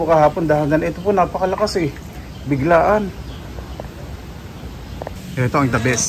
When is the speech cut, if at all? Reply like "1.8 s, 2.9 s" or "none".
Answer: 5.2 s